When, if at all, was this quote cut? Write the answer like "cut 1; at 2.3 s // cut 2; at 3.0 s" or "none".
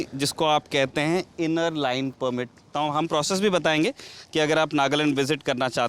cut 1; at 2.6 s